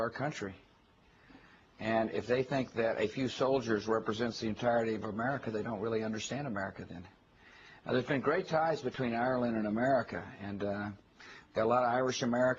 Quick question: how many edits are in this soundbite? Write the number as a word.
zero